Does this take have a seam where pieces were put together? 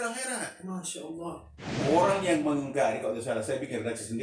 yes; 1 cut; at 1.9 s

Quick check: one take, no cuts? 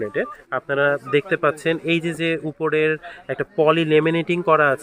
yes; 0 cuts

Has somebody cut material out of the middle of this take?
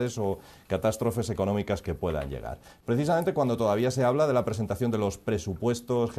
yes; 1 cut; at 1.0 s

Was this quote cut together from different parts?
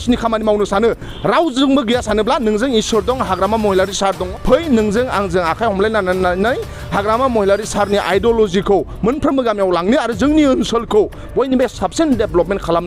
yes; 1 cut; at 4.2 s

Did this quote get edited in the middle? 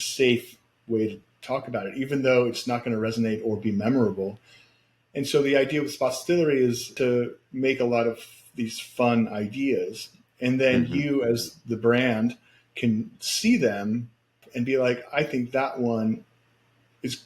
yes; 2 cuts; at 6.9 s, 14.4 s

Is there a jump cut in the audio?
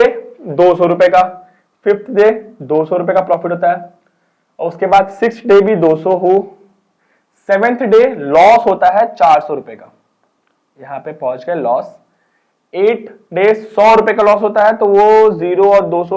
no; 0 cuts

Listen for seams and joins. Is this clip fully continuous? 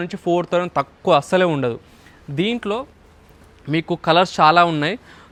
yes; 0 cuts

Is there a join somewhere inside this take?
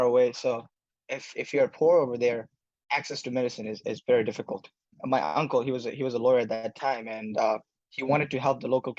yes; 1 cut; at 4.9 s

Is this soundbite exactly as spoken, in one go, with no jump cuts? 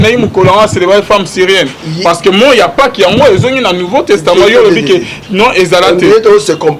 yes; 0 cuts

